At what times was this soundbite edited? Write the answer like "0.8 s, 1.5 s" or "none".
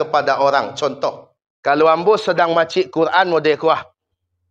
1.0 s